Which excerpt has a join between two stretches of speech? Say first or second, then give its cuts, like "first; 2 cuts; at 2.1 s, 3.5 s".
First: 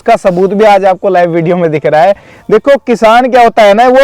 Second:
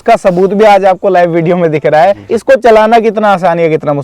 second; 1 cut; at 2.3 s